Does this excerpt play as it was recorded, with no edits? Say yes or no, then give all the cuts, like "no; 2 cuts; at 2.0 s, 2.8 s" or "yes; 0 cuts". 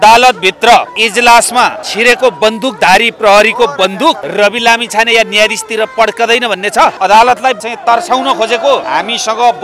no; 7 cuts; at 1.0 s, 1.8 s, 3.1 s, 4.2 s, 7.0 s, 7.6 s, 8.9 s